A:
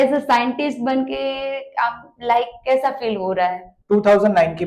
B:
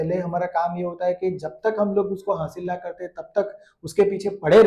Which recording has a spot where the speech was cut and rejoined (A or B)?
A